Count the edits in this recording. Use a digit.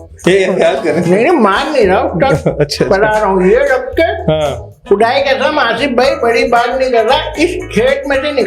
0